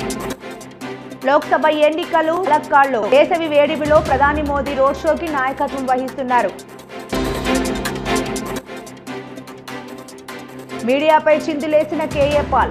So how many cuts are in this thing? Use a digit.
1